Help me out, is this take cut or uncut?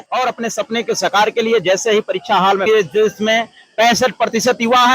cut